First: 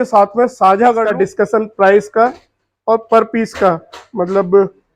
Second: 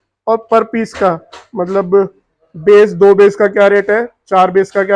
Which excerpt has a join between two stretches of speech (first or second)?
first